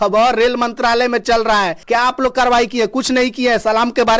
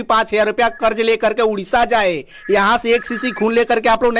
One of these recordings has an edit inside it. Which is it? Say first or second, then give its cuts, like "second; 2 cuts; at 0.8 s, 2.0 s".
first; 1 cut; at 1.8 s